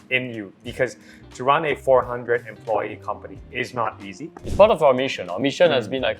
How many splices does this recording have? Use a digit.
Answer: 1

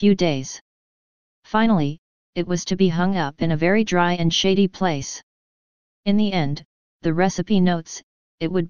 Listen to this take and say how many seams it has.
1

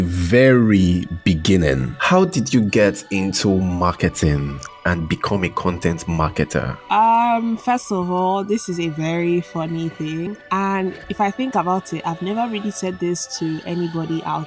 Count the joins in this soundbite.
3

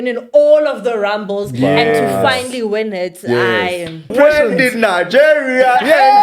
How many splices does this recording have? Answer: 1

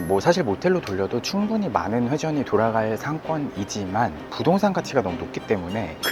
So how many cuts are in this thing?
0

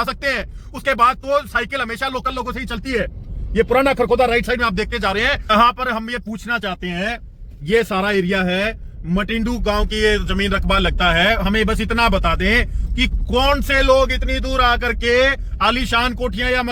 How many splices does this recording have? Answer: 1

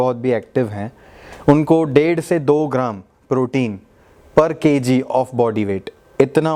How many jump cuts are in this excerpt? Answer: 0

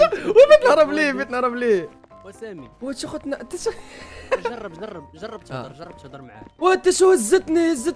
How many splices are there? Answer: 2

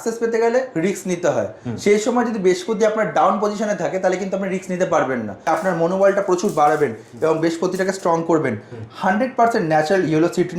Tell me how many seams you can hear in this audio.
1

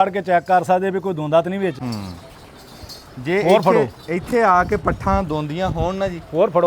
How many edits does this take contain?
1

